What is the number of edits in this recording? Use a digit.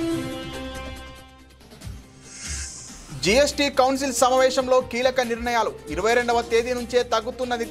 0